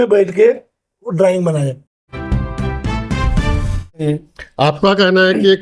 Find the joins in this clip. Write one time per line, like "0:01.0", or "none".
0:02.1
0:04.0